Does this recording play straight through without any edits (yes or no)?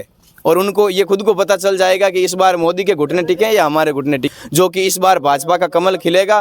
no